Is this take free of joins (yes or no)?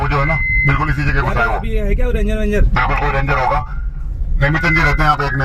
yes